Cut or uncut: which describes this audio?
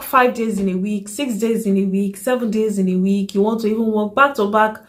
uncut